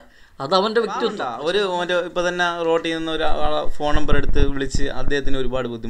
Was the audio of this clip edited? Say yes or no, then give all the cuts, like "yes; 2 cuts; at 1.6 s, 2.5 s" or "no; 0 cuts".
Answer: yes; 1 cut; at 1.3 s